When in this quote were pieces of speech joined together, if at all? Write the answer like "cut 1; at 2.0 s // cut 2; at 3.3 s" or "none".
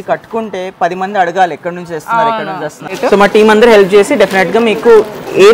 cut 1; at 2.9 s

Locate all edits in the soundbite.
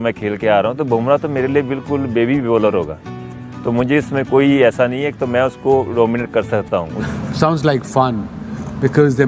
cut 1; at 7.1 s

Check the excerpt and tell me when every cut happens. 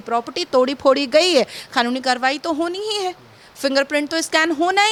none

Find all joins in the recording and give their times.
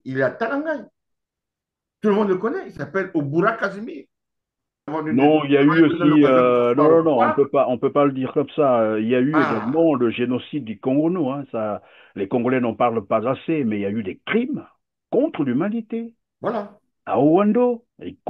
cut 1; at 4.9 s

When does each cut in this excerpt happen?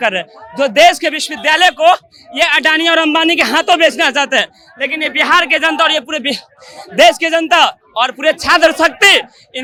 none

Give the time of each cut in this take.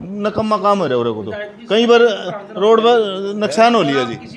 none

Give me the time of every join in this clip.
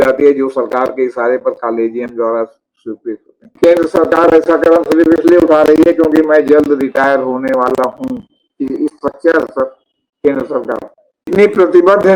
cut 1; at 3.6 s // cut 2; at 11.3 s

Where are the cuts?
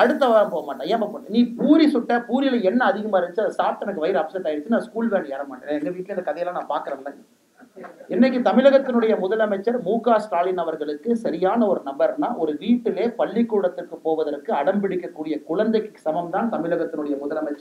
none

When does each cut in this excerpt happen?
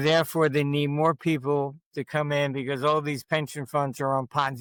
none

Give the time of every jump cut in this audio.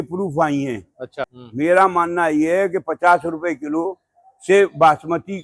cut 1; at 1.2 s

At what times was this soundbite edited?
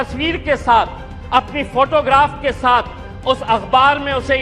none

